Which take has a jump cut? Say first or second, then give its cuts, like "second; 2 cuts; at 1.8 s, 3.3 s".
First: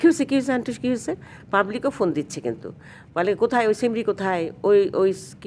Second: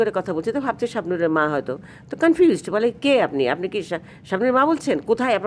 first; 1 cut; at 1.3 s